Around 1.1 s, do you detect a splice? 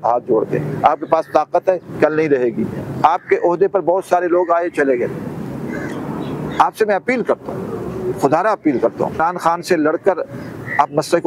no; 1 cut; at 9.2 s

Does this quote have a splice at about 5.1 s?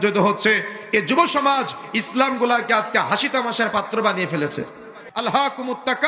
yes; 1 cut; at 5.1 s

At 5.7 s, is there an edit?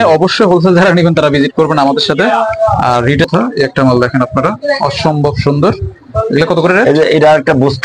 no; 1 cut; at 3.2 s

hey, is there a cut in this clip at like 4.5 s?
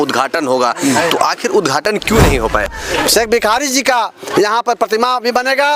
no; 1 cut; at 2.7 s

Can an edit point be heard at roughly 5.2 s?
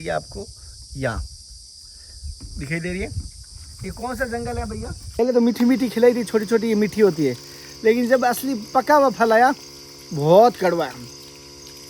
yes; 1 cut; at 5.2 s

